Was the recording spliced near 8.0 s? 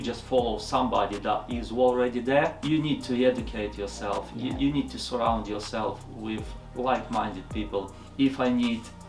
yes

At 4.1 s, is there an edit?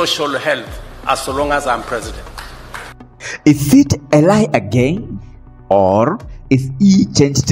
no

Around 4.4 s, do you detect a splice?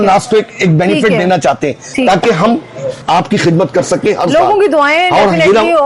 no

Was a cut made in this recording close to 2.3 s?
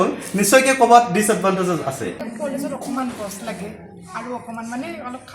yes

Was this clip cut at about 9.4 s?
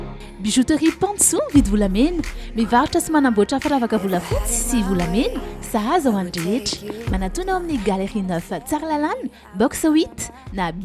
no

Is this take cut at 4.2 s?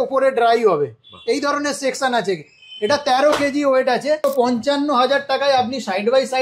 yes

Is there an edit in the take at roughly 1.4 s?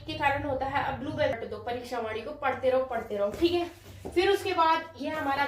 yes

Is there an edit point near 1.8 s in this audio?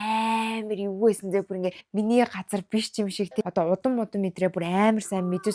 yes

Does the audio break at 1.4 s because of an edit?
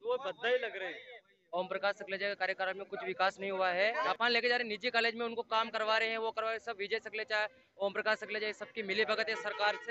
yes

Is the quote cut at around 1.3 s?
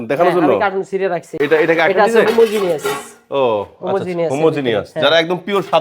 yes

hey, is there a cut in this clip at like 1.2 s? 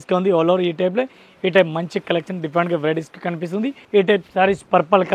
no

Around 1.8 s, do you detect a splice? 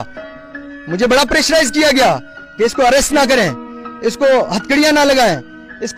no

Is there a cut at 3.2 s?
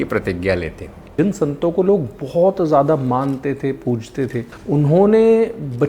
no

